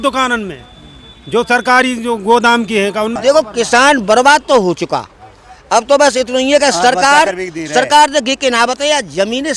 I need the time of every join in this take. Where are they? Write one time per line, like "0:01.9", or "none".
0:03.2

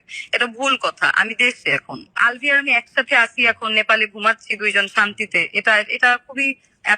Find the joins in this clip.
0:02.2

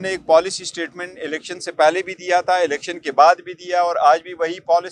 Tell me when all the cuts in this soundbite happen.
none

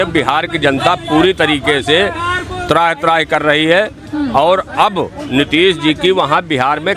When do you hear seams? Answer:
none

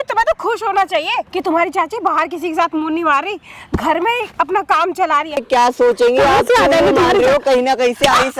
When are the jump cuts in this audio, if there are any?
0:01.3
0:05.4

